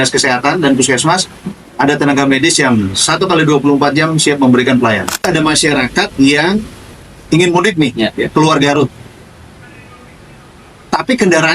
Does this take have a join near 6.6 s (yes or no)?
no